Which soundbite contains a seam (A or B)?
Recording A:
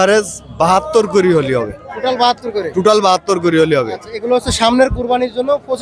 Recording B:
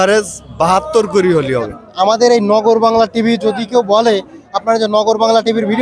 B